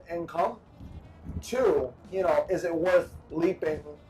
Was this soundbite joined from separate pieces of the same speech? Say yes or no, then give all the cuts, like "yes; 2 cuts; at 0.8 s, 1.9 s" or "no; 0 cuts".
yes; 1 cut; at 2.0 s